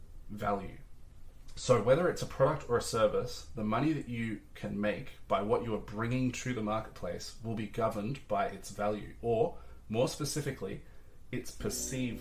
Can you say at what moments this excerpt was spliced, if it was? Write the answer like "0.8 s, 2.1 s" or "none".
none